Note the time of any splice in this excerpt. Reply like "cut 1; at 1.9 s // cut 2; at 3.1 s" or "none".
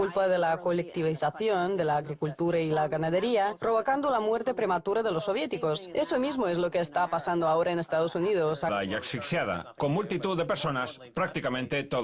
none